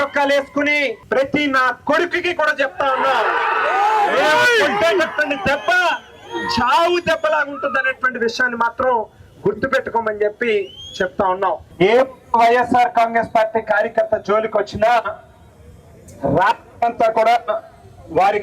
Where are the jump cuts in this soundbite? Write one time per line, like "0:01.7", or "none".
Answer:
0:01.0
0:11.7